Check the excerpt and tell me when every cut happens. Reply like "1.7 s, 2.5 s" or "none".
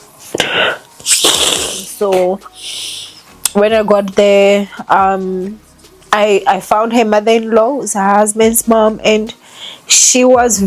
1.8 s